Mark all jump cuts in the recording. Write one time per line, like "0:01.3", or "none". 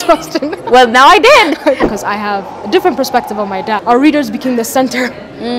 0:01.9
0:03.8

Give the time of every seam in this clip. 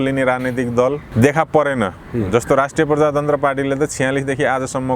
0:01.1

